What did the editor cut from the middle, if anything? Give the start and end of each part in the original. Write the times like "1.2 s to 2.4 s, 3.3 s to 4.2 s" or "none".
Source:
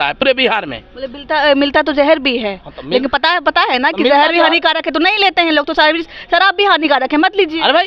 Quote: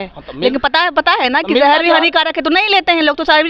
none